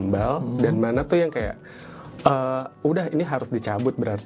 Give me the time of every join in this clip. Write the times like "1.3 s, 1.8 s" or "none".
none